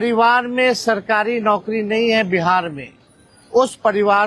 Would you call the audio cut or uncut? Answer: uncut